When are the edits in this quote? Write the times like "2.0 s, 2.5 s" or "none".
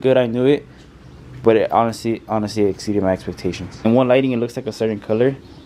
3.7 s

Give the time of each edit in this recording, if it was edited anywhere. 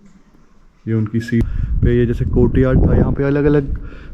1.4 s

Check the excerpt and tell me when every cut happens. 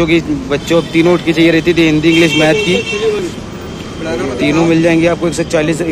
none

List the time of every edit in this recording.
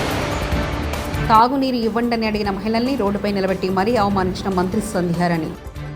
1.1 s

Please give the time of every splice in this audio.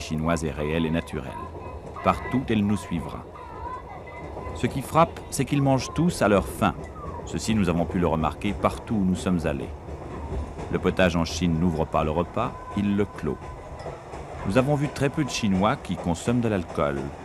4.9 s

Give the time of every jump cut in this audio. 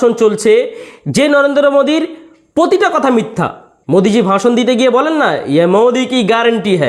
none

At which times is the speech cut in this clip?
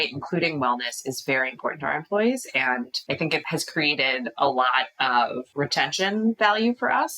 3.2 s, 5.4 s

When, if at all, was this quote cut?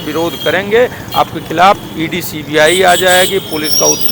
none

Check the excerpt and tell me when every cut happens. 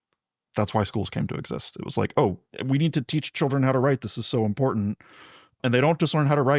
2.5 s, 5.6 s

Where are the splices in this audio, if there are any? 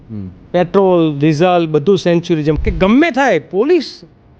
2.6 s

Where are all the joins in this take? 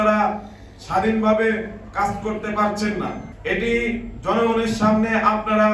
3.3 s

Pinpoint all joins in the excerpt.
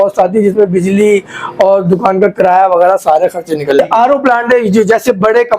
3.8 s

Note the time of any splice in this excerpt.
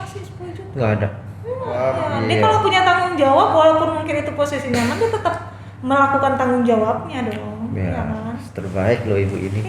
1.8 s

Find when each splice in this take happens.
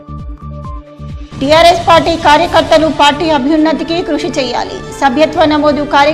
none

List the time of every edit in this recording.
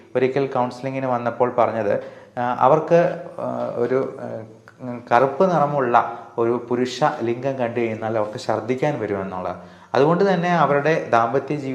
none

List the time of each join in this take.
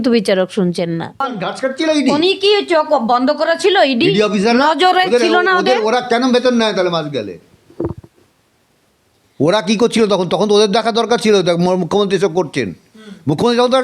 1.4 s

